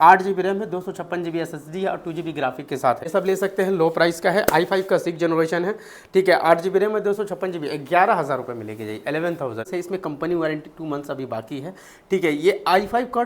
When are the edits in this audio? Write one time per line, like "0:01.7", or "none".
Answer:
0:03.1
0:09.7